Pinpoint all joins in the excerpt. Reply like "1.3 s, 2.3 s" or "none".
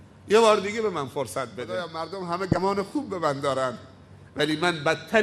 1.9 s